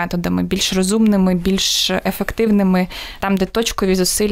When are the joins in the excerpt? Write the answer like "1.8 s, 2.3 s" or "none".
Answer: none